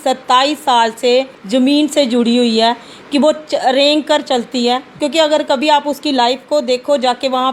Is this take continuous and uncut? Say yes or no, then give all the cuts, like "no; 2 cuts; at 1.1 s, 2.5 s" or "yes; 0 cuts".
no; 2 cuts; at 1.4 s, 4.9 s